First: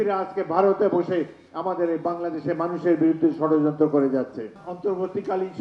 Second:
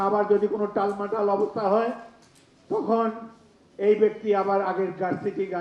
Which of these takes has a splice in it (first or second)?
first